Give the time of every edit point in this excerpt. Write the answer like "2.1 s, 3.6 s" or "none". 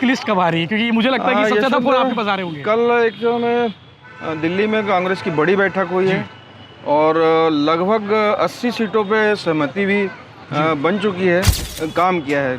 11.6 s